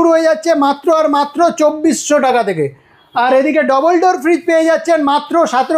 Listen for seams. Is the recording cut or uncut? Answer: uncut